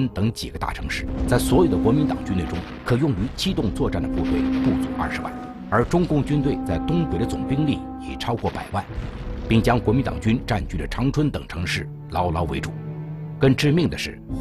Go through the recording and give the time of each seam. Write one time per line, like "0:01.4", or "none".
none